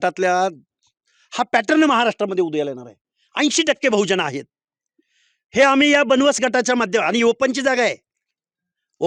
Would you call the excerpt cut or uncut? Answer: uncut